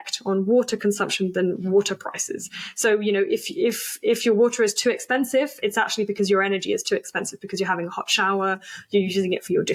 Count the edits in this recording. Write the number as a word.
zero